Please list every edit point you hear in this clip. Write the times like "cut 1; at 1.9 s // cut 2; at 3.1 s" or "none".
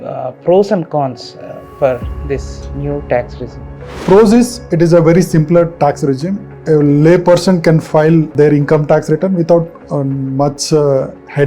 cut 1; at 4.0 s // cut 2; at 6.5 s // cut 3; at 8.3 s